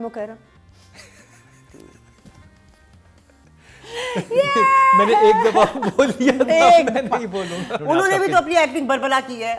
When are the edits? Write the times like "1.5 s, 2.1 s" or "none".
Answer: 7.8 s